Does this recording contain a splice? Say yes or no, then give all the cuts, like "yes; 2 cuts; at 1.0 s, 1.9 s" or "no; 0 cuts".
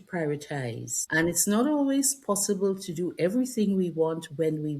yes; 1 cut; at 1.0 s